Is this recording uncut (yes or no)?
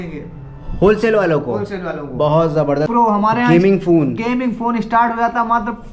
no